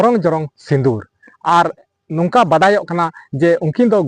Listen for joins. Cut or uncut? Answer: cut